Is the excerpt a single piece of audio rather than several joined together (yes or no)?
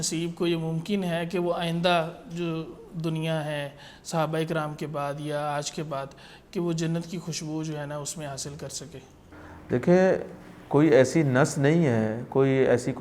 yes